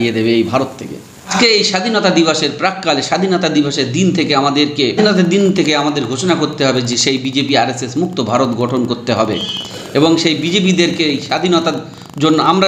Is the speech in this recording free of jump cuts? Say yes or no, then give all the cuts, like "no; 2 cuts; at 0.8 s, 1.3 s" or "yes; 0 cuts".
no; 2 cuts; at 1.3 s, 4.9 s